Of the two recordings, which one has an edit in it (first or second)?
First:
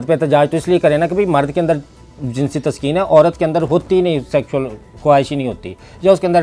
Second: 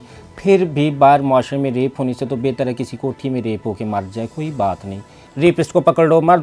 second